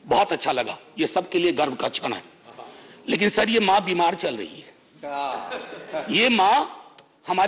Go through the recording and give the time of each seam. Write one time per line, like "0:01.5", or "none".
none